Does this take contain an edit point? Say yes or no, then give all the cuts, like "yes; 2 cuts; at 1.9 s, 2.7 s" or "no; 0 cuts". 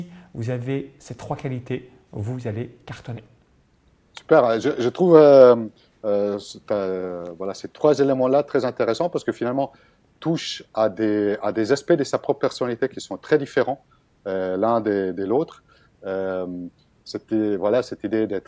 no; 0 cuts